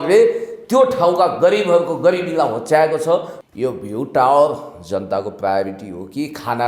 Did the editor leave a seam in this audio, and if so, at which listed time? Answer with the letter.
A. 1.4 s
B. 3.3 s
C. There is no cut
B